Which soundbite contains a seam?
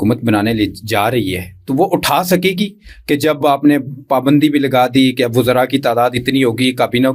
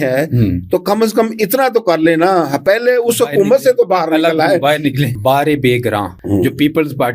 second; 2 cuts; at 5.1 s, 6.1 s

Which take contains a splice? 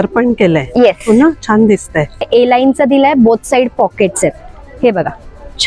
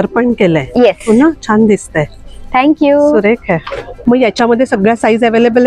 first; 1 cut; at 2.3 s

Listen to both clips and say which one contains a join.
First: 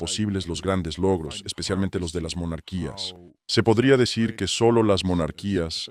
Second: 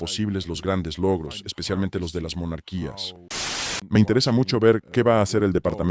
second; 1 cut; at 3.5 s

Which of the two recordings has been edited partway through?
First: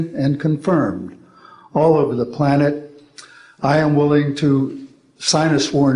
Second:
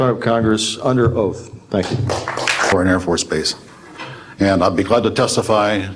second; 1 cut; at 2.7 s

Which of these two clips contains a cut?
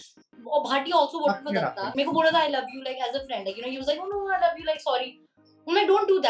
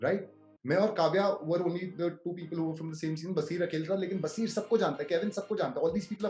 first; 1 cut; at 1.9 s

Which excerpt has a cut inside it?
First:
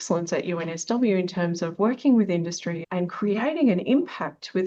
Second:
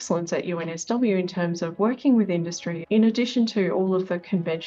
second; 1 cut; at 2.7 s

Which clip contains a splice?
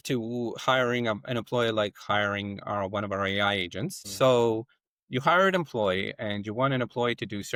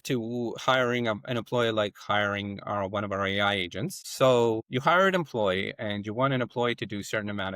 second; 1 cut; at 4.7 s

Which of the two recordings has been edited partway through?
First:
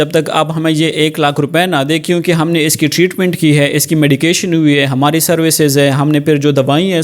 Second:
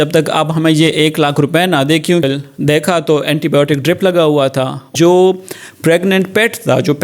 second; 2 cuts; at 2.2 s, 4.9 s

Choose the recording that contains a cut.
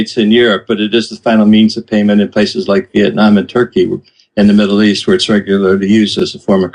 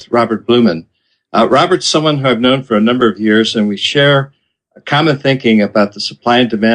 second; 1 cut; at 4.4 s

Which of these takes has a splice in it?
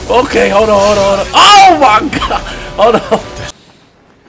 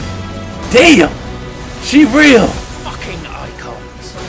first; 1 cut; at 3.3 s

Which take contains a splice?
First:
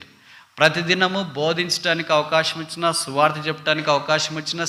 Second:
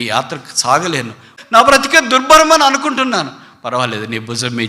second; 1 cut; at 1.3 s

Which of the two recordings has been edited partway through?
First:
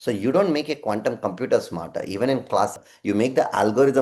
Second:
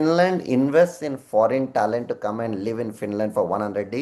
first; 1 cut; at 2.8 s

